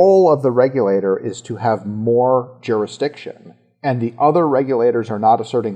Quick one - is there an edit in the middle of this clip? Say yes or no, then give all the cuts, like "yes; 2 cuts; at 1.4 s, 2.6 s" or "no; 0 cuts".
no; 0 cuts